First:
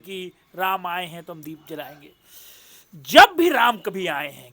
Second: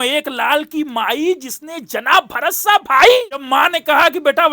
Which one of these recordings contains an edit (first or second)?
second